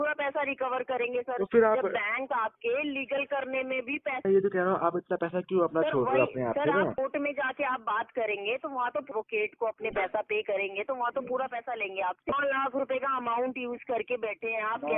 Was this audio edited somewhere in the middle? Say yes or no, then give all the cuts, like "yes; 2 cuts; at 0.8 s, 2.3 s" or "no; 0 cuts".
yes; 4 cuts; at 4.2 s, 7.0 s, 9.1 s, 12.3 s